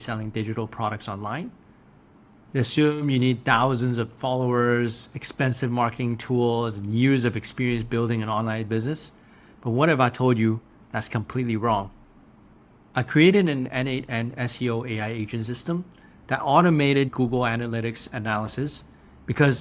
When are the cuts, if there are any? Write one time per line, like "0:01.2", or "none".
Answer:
0:17.1

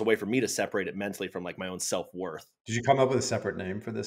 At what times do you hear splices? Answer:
none

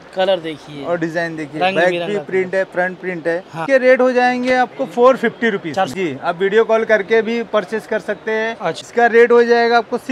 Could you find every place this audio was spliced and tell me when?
0:03.6
0:05.9
0:08.8

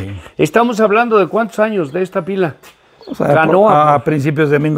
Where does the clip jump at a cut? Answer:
none

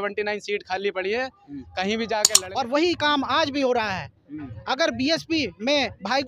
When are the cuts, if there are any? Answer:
0:02.3

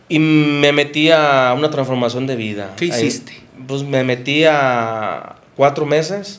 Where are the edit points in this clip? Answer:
none

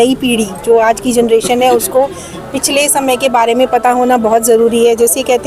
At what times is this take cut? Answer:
none

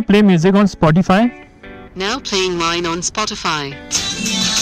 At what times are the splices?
none

